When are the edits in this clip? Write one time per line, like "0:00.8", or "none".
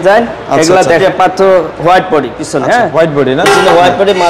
0:01.0